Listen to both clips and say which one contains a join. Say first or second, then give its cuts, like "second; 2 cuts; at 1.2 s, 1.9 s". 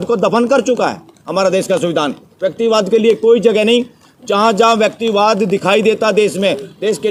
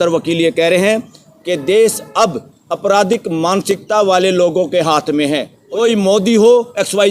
second; 1 cut; at 5.5 s